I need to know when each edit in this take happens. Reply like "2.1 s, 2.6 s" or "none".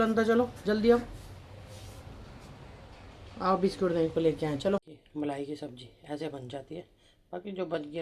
5.0 s